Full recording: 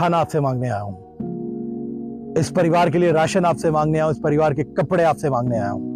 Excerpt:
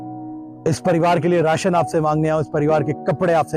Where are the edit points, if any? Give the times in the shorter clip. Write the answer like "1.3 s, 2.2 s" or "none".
none